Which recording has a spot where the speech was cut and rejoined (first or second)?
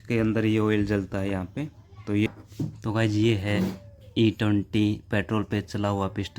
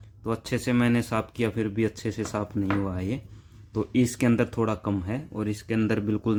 first